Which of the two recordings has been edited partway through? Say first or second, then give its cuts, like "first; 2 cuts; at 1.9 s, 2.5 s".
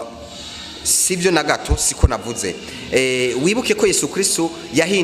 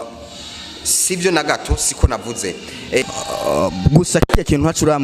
second; 1 cut; at 3.0 s